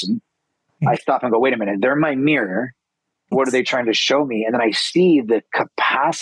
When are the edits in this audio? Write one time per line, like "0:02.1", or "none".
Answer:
0:03.3